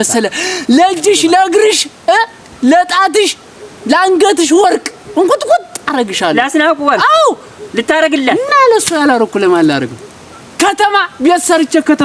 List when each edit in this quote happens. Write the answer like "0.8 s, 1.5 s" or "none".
none

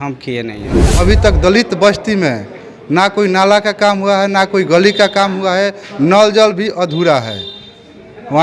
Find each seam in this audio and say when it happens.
1.0 s

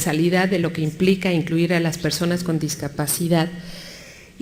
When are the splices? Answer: none

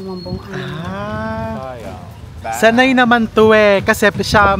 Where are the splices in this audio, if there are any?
2.3 s

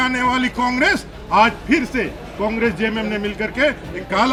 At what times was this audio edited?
none

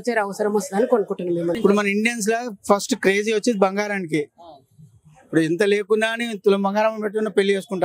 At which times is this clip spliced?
1.6 s

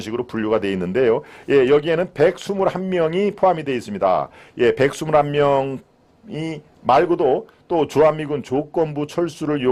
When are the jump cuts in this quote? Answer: none

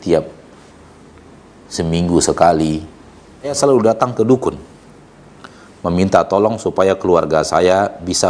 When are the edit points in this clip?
3.5 s

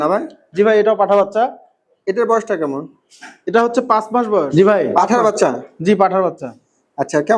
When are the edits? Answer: 4.5 s

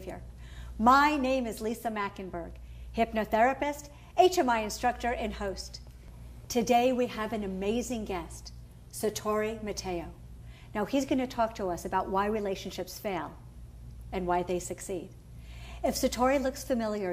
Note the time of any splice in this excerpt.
15.7 s

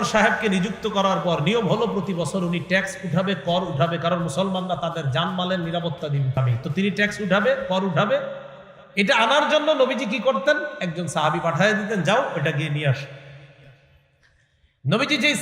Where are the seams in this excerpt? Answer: 6.4 s

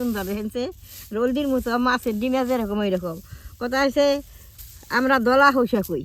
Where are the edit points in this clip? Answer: none

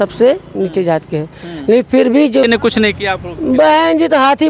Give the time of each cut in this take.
2.4 s

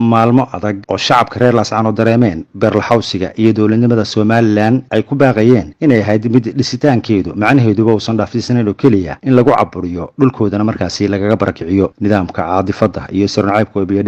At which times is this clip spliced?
none

